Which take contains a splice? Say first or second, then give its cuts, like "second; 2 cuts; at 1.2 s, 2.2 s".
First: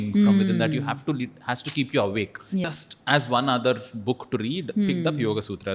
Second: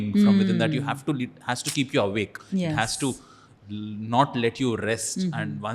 first; 1 cut; at 2.7 s